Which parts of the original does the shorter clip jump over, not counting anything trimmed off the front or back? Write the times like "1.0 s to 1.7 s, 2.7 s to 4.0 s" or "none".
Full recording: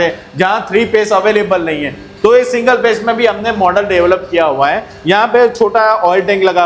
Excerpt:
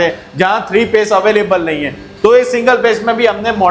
none